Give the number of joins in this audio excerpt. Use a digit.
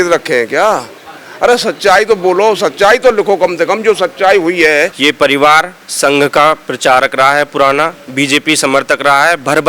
1